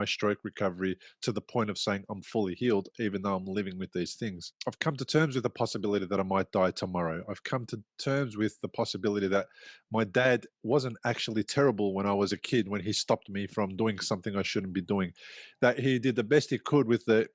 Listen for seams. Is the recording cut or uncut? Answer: cut